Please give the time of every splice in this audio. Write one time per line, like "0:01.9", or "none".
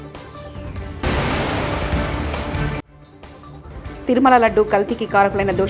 0:01.0
0:02.9